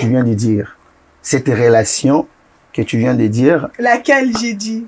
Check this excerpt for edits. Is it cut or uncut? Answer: uncut